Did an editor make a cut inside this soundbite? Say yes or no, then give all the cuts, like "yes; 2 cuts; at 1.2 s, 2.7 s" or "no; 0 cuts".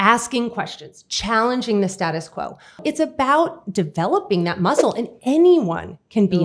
yes; 1 cut; at 2.8 s